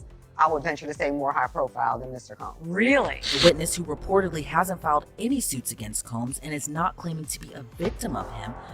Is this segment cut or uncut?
cut